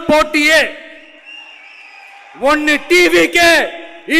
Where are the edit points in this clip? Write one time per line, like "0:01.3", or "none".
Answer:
none